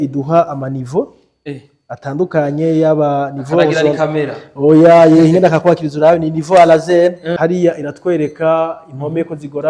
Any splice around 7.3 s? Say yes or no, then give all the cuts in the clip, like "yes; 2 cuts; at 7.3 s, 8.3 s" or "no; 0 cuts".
yes; 1 cut; at 7.3 s